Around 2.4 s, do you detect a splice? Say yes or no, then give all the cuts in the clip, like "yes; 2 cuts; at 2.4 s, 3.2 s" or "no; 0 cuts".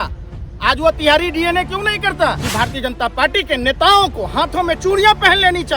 yes; 1 cut; at 2.4 s